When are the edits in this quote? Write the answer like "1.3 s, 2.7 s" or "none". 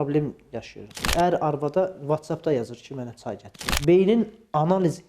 1.1 s, 3.7 s